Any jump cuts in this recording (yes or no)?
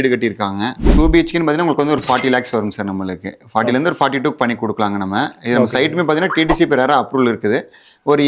yes